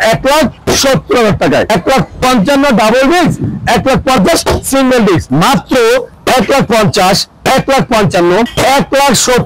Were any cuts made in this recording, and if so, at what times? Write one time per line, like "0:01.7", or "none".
0:01.7
0:05.3
0:08.5